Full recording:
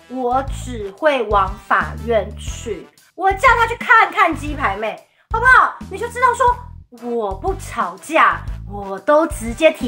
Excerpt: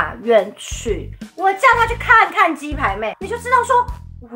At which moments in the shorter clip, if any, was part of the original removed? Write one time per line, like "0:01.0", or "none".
0:03.3